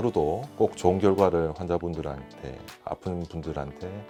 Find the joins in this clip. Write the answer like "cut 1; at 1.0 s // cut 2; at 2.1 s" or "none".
none